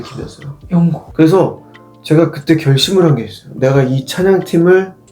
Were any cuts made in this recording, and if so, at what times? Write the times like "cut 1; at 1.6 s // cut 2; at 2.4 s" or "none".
cut 1; at 1.0 s